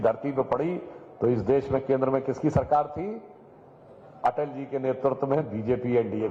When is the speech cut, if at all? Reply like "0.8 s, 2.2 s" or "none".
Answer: none